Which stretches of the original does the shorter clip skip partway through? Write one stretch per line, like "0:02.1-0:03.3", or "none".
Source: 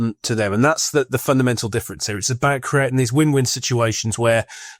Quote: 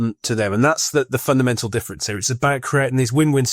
none